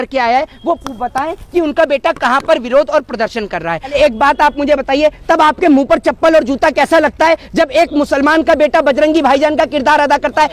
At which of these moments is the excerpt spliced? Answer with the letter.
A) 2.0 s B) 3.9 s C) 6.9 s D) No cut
B